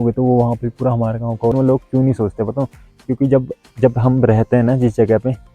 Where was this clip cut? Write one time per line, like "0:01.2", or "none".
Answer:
0:01.5